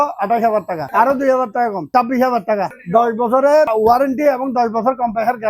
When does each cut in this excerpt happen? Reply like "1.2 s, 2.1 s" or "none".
0.9 s, 1.9 s, 2.8 s, 3.7 s